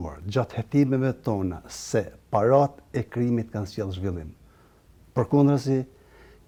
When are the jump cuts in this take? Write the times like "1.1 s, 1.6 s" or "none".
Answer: none